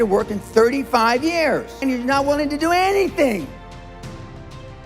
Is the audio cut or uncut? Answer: cut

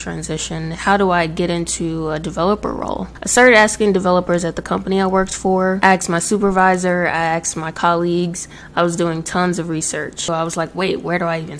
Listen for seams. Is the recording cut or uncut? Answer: cut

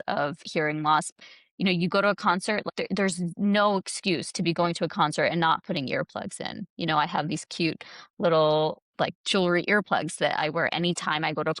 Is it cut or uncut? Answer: cut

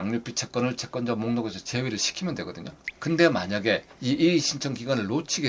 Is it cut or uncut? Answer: uncut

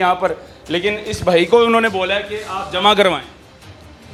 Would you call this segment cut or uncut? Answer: uncut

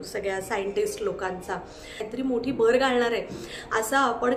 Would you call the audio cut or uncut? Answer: cut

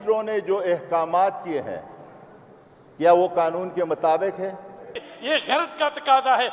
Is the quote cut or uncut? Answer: cut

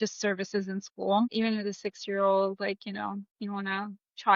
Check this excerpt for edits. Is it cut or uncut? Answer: cut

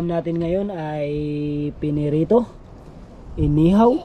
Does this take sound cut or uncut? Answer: uncut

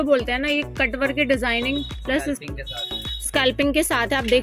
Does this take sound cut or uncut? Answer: uncut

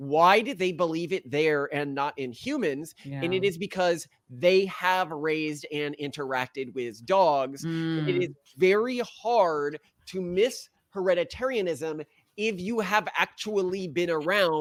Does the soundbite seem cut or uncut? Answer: uncut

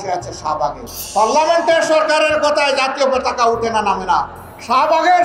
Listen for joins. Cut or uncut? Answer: cut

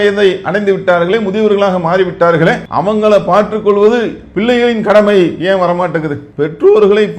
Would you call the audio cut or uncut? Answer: cut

